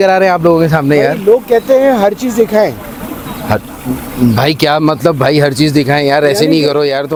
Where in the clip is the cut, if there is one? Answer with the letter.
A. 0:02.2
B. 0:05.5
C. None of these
C